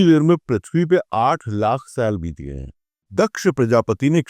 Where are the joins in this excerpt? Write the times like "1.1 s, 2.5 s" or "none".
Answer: 3.0 s